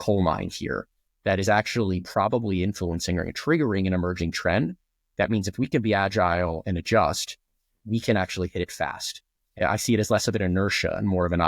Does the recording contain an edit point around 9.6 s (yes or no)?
yes